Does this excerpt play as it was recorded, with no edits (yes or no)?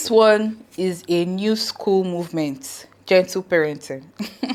yes